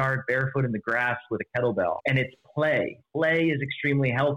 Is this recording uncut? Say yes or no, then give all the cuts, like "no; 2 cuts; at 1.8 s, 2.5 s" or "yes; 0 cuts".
no; 2 cuts; at 2.0 s, 3.0 s